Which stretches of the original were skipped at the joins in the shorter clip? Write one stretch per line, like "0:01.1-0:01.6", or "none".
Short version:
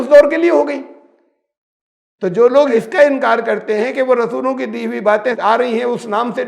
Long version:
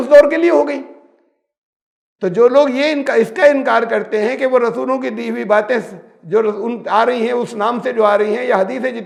0:02.7-0:03.1
0:05.8-0:06.9